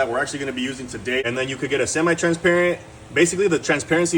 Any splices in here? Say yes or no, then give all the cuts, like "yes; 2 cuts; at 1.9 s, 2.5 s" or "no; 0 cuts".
yes; 1 cut; at 1.2 s